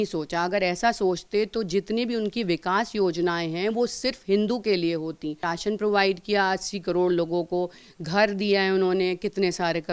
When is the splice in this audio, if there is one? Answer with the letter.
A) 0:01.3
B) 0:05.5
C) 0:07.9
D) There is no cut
B